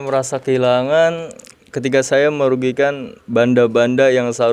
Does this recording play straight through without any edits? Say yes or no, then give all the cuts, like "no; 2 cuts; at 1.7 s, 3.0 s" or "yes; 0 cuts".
yes; 0 cuts